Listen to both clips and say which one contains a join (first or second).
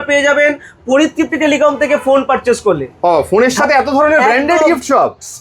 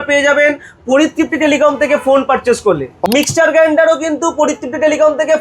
second